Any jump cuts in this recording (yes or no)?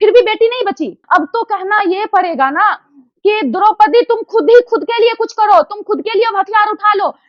yes